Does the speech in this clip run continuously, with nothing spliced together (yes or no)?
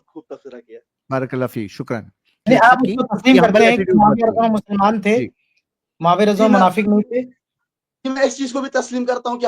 no